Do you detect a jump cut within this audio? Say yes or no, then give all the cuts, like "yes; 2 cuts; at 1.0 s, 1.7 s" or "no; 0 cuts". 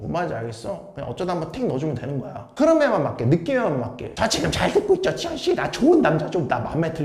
no; 0 cuts